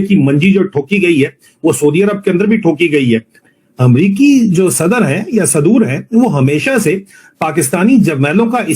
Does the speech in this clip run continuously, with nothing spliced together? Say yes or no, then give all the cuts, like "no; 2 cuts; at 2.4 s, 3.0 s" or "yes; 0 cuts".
no; 1 cut; at 3.4 s